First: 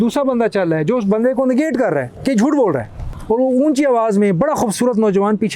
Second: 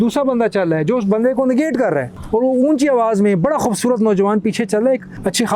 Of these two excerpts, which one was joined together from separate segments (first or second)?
second